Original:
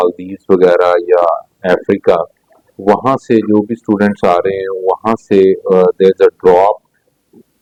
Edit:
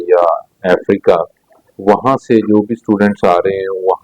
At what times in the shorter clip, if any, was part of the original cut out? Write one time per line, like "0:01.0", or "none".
none